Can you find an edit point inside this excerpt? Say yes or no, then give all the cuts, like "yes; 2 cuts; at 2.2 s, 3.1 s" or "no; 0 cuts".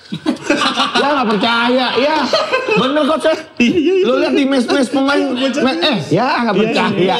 no; 0 cuts